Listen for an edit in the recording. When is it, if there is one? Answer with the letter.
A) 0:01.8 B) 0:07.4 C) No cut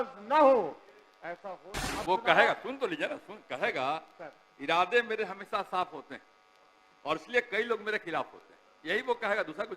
A